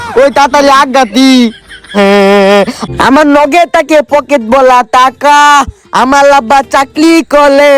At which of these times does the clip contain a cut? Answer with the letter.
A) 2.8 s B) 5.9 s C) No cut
A